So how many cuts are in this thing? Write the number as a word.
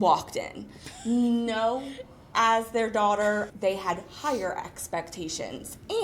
one